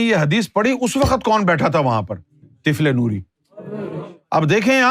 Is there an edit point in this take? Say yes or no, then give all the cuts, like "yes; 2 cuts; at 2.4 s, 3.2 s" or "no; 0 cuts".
yes; 1 cut; at 4.0 s